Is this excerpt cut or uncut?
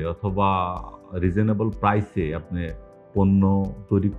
uncut